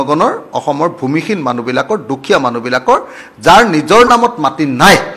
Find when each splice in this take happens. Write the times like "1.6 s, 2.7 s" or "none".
none